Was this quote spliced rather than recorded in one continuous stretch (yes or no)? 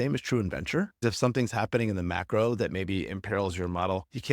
yes